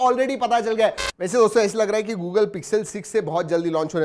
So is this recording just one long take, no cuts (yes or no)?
no